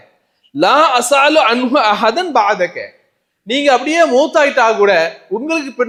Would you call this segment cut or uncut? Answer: uncut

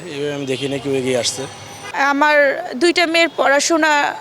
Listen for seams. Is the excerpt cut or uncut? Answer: cut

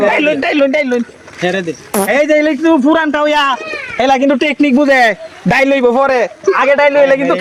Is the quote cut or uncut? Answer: uncut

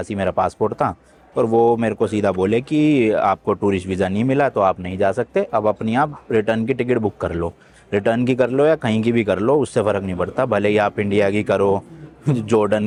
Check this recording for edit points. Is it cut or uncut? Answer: uncut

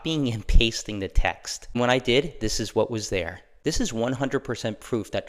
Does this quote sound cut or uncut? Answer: cut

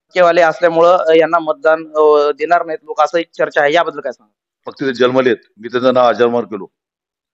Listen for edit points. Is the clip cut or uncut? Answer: cut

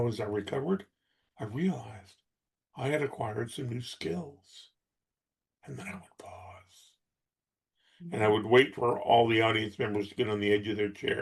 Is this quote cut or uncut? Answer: uncut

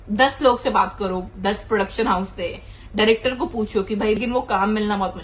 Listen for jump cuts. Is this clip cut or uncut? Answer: cut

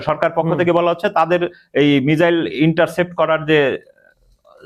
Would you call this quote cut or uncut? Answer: uncut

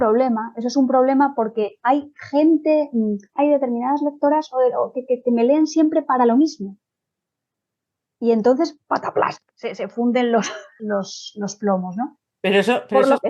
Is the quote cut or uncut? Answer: cut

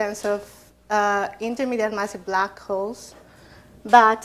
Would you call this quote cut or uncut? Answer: uncut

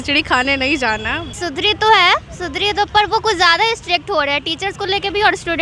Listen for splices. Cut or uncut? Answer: cut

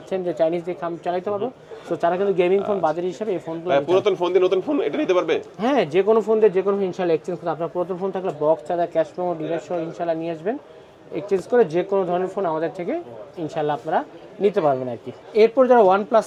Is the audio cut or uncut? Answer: uncut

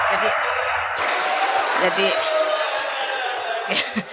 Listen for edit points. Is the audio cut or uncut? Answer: uncut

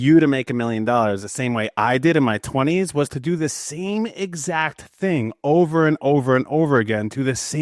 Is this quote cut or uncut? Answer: uncut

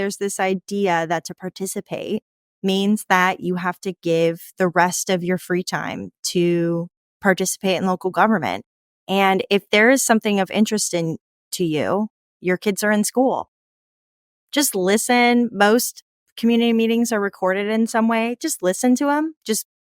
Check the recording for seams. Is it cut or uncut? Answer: cut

